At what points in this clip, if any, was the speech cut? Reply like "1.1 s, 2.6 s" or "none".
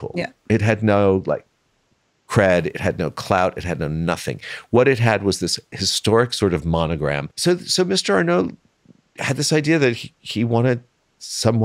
7.3 s